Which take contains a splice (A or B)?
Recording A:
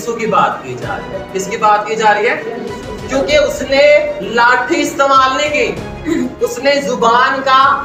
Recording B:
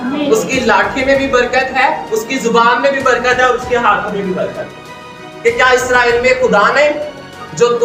B